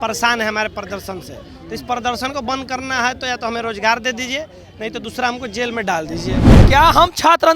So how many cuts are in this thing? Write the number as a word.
one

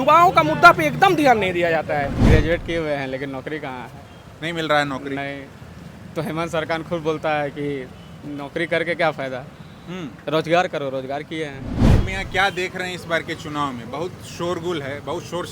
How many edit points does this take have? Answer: two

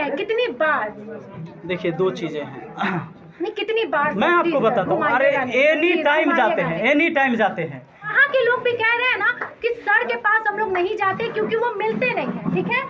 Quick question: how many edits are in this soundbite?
one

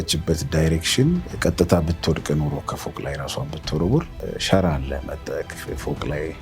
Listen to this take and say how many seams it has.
two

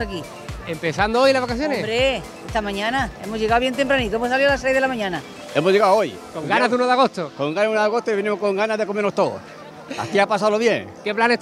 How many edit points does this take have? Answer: zero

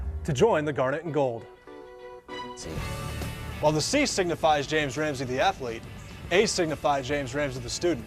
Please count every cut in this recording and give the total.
one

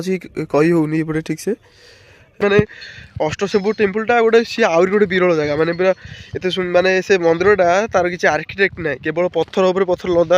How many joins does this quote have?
one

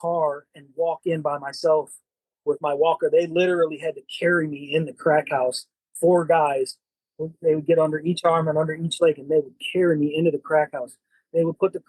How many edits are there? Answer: zero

